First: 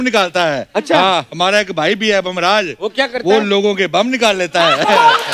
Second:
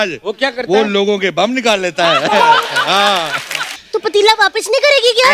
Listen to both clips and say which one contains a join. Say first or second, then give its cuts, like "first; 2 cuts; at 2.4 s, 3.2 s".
second; 1 cut; at 3.8 s